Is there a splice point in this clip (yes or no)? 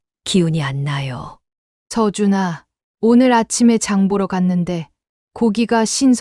no